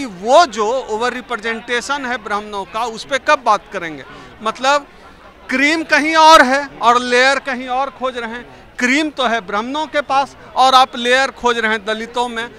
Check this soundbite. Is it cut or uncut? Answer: uncut